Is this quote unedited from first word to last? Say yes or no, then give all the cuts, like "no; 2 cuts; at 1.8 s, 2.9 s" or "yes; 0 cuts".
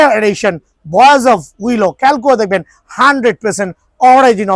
yes; 0 cuts